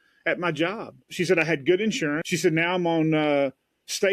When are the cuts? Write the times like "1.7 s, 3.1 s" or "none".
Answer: 1.0 s, 2.2 s